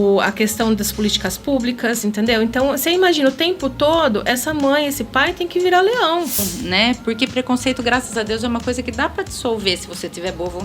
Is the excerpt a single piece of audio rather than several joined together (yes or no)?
no